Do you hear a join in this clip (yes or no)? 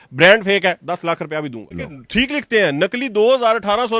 yes